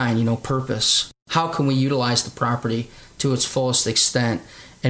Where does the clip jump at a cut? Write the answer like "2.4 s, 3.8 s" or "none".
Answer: 1.2 s